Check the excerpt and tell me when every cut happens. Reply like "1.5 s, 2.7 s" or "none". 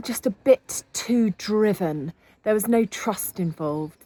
none